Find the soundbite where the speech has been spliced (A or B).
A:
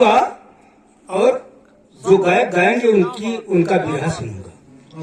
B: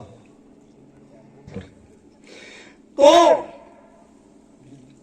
B